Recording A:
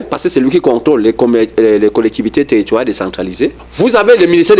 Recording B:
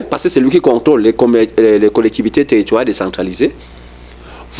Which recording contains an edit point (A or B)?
A